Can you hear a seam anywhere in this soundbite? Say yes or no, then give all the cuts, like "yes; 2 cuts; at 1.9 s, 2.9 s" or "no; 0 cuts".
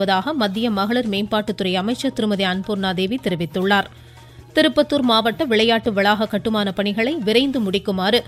no; 0 cuts